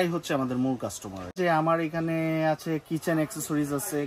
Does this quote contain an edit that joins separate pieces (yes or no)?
yes